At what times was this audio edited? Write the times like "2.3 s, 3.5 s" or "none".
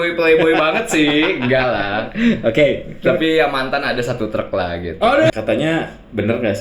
5.3 s